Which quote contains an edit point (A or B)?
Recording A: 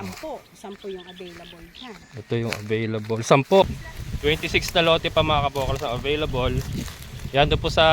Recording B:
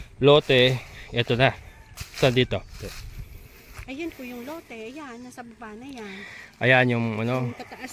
A